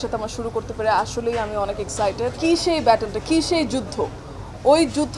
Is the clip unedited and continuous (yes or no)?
no